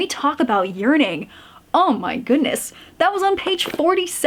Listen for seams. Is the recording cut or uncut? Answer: uncut